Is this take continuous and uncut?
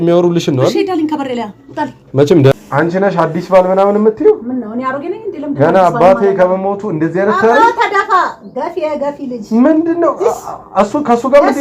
no; 1 cut; at 2.6 s

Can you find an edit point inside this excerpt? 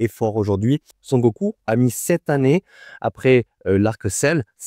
yes; 1 cut; at 1.0 s

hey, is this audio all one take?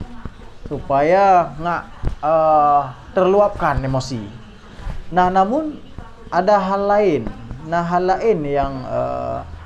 yes; 0 cuts

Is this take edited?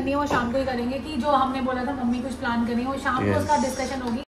no; 0 cuts

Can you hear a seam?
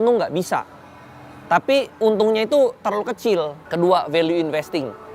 yes; 1 cut; at 3.6 s

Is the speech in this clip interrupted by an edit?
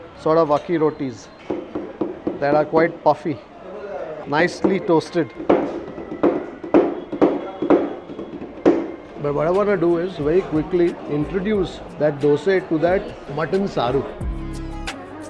yes; 1 cut; at 9.1 s

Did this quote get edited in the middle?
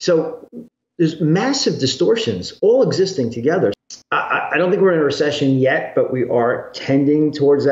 yes; 1 cut; at 3.8 s

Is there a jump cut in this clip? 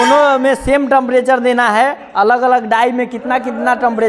no; 0 cuts

